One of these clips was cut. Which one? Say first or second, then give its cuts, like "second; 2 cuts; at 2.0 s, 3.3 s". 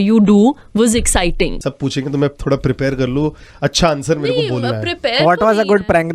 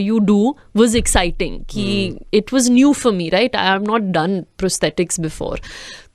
first; 1 cut; at 1.6 s